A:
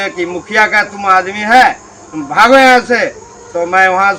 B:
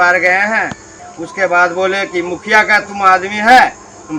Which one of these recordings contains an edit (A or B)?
B